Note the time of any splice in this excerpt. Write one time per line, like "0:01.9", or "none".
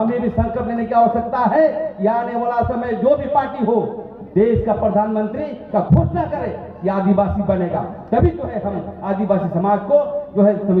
none